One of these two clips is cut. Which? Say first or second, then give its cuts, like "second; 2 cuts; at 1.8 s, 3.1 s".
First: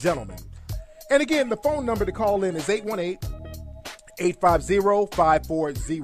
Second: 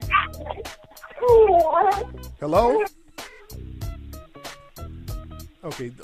second; 1 cut; at 1.8 s